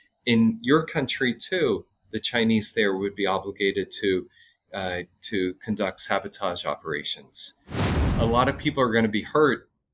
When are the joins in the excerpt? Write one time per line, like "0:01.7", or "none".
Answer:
0:08.0